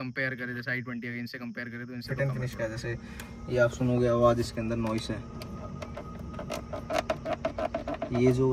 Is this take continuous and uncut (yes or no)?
no